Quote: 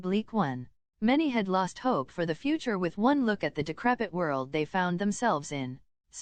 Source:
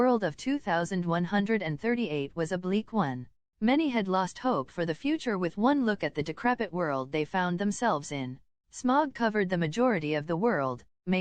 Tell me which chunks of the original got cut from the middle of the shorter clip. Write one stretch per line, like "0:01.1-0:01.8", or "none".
none